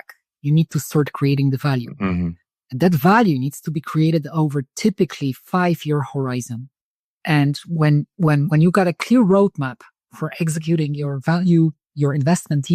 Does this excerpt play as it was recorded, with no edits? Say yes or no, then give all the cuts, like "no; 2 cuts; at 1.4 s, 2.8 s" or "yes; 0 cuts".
no; 1 cut; at 6.9 s